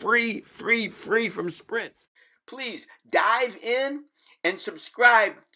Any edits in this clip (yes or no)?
yes